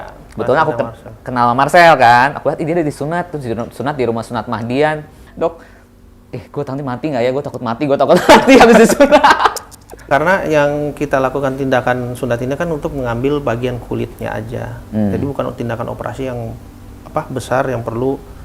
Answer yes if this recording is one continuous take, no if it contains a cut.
no